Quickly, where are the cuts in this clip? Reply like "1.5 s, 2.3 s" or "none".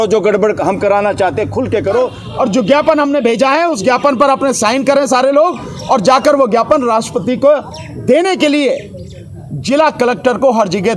2.2 s